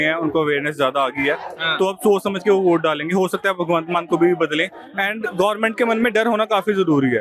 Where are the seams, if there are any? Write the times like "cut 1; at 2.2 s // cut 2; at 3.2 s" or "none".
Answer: none